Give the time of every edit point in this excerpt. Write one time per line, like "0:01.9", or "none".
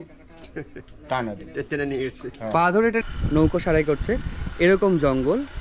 0:03.0